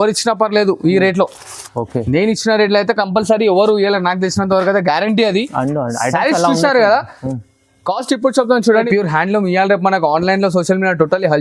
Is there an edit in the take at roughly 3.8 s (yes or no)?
no